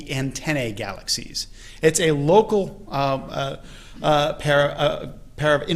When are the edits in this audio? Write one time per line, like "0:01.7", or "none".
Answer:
none

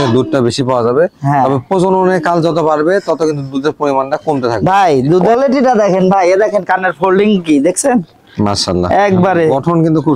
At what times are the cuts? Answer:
0:05.3

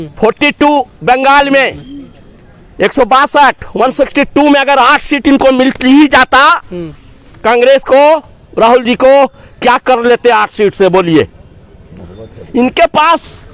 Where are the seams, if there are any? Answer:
none

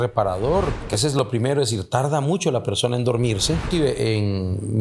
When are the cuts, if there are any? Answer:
0:00.8
0:03.7

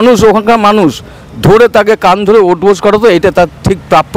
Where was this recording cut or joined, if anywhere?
none

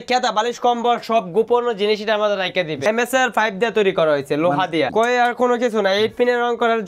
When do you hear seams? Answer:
0:02.8
0:04.9

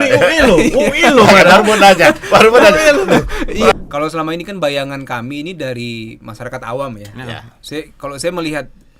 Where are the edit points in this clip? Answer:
0:03.7

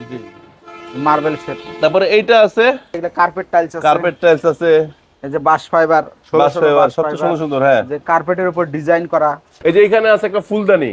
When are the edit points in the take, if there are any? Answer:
0:03.0
0:09.5

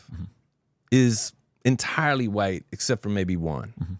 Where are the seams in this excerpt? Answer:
none

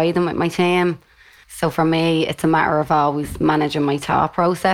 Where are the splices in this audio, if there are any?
0:01.4

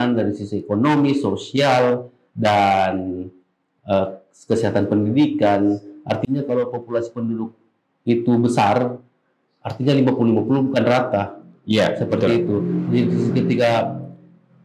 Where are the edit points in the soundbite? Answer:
none

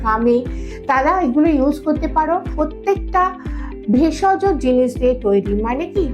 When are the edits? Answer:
0:02.5

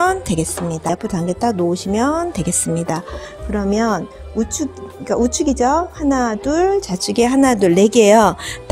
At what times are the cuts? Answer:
0:00.9

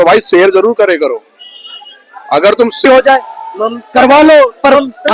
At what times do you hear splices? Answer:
0:02.8

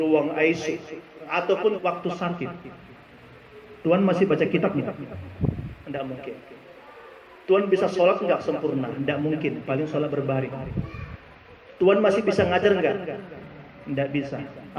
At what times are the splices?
0:01.8

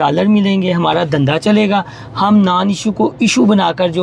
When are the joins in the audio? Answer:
none

